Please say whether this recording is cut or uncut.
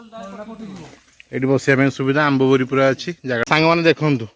cut